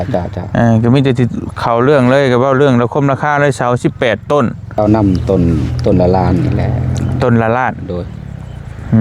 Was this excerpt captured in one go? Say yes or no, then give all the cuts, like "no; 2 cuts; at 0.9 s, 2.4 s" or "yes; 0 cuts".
no; 1 cut; at 4.8 s